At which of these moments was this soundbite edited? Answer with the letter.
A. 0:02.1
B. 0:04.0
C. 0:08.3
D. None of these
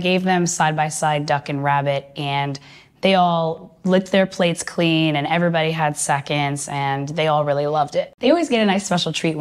C